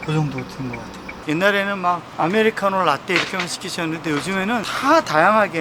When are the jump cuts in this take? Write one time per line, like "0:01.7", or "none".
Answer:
0:01.1